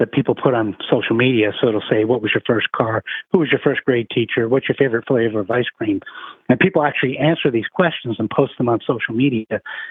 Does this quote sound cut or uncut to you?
uncut